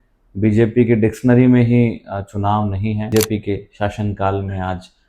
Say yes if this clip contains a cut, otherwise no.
yes